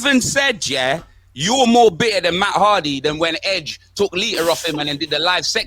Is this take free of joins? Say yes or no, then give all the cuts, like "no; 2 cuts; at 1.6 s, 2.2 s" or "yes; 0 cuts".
yes; 0 cuts